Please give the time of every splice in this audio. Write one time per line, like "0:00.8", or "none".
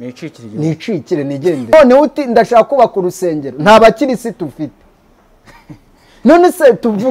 0:01.7